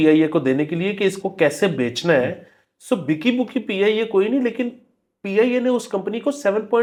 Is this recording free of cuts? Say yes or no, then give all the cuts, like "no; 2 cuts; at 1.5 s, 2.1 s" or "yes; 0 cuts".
yes; 0 cuts